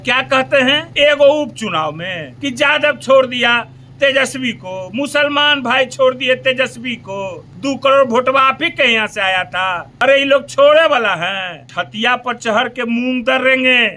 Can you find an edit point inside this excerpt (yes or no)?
no